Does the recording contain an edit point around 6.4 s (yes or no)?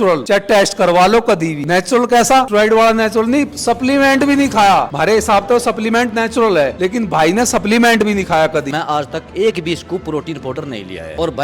no